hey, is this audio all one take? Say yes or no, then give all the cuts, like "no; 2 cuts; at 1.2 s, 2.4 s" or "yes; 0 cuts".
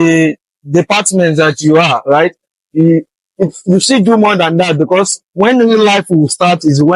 yes; 0 cuts